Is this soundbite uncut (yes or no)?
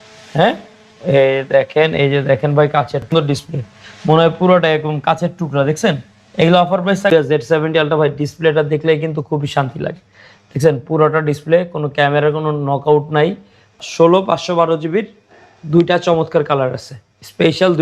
no